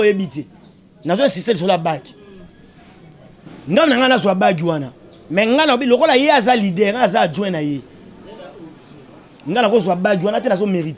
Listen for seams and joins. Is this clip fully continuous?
yes; 0 cuts

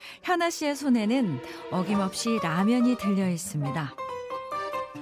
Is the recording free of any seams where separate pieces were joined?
yes; 0 cuts

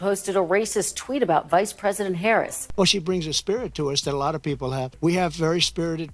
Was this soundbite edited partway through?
yes; 2 cuts; at 2.6 s, 4.9 s

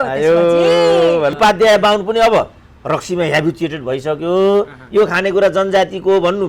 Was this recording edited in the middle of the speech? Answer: yes; 1 cut; at 1.3 s

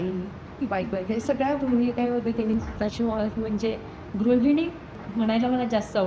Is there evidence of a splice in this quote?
yes; 2 cuts; at 2.5 s, 5.0 s

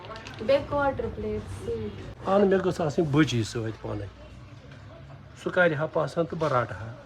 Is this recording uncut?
no; 1 cut; at 2.1 s

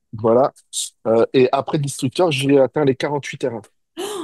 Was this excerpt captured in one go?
yes; 0 cuts

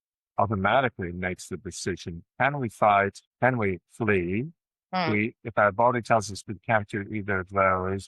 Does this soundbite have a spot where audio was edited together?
yes; 1 cut; at 3.2 s

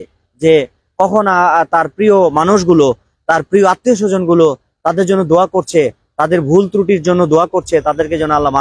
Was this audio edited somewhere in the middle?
no; 0 cuts

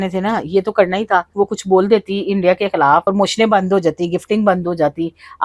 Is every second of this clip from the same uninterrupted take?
no; 2 cuts; at 1.3 s, 3.0 s

